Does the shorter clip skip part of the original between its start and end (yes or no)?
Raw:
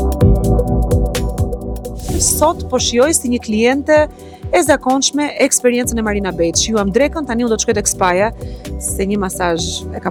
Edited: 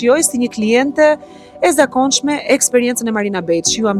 no